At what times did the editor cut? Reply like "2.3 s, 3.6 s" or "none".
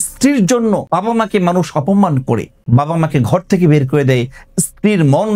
0.8 s, 2.5 s